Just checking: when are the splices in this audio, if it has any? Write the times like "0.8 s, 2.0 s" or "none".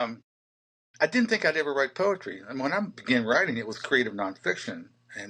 none